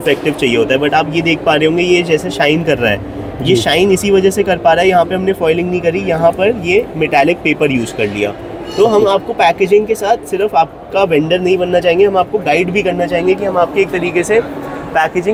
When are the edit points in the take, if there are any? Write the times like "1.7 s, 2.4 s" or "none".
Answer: none